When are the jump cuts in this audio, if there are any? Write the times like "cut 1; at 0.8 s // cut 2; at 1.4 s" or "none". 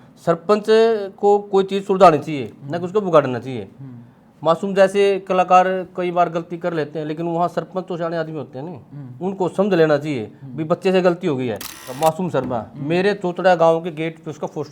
cut 1; at 11.9 s